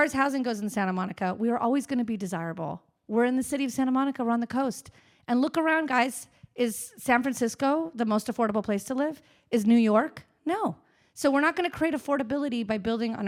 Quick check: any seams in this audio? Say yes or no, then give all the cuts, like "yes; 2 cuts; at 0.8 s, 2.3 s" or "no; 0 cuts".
no; 0 cuts